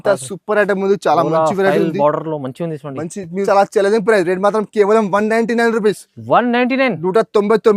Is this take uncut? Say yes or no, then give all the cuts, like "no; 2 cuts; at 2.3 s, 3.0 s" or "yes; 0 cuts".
no; 1 cut; at 3.5 s